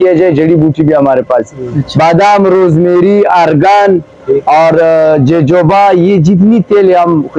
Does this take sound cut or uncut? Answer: uncut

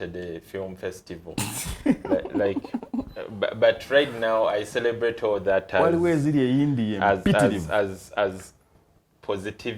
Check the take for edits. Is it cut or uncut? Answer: uncut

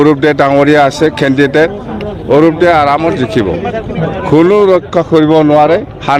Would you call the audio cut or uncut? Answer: uncut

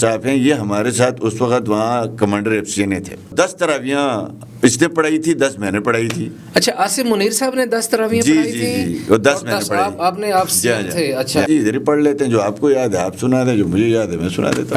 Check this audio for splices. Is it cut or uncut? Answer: cut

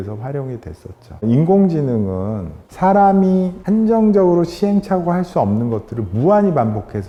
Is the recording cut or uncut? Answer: uncut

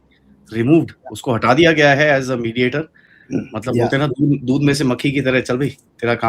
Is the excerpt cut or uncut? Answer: uncut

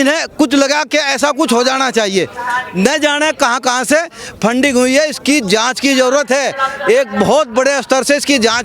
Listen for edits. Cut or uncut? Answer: uncut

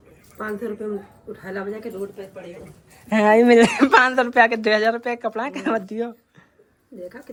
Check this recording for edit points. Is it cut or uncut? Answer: uncut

